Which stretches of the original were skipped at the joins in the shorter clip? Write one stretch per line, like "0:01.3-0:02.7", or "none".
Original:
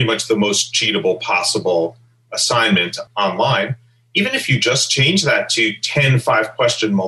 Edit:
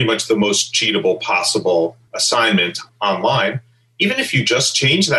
0:02.5-0:02.6